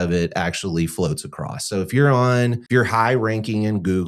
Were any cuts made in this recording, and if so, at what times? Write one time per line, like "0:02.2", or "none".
0:02.6